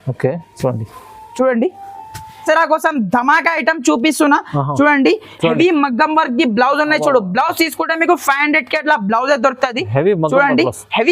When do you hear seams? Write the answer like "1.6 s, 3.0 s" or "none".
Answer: 2.4 s